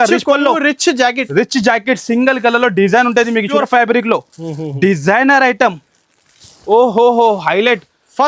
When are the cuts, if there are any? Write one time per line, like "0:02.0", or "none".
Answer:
0:03.5